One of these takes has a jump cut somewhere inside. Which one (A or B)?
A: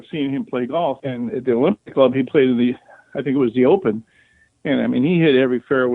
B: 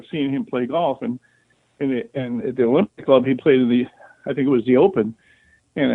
A